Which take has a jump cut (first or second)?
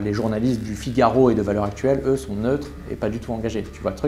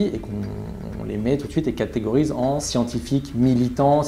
second